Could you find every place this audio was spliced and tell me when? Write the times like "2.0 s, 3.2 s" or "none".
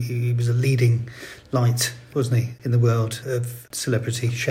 2.3 s, 3.5 s

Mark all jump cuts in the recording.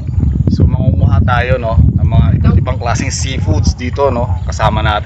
none

